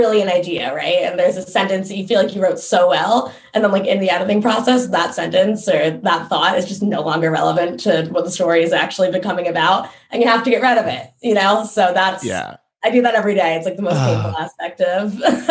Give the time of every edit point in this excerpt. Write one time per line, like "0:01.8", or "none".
none

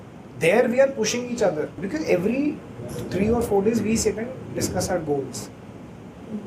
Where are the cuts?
0:01.8

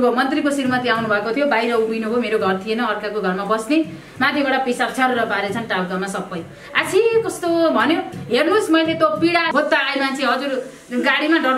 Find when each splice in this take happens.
0:09.5

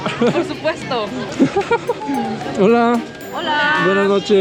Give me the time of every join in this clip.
none

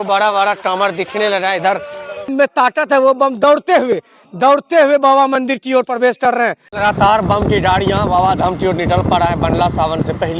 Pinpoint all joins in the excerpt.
0:02.3
0:06.7

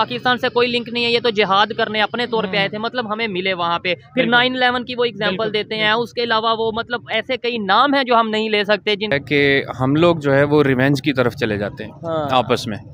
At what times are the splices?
0:09.1

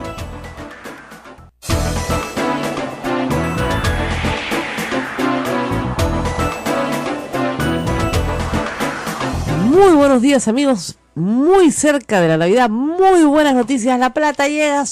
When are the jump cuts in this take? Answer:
0:01.5
0:02.9

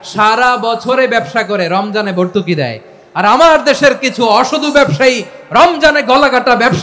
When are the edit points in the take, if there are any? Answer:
none

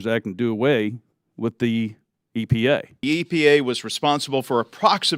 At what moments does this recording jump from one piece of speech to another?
0:03.0

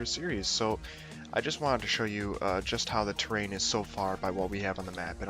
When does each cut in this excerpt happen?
0:03.5

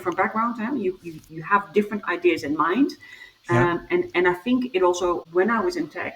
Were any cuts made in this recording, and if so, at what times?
0:05.2

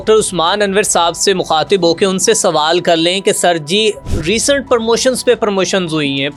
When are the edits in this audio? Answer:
none

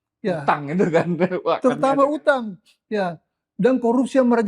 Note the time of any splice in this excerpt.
none

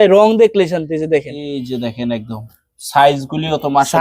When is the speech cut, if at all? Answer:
none

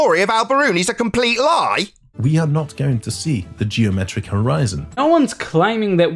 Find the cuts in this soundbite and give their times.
0:02.2
0:05.0

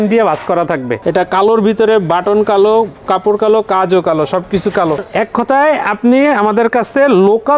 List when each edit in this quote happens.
0:00.9
0:05.1

